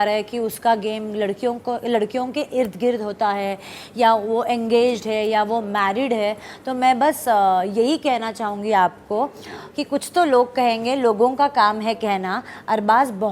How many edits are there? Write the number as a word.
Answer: zero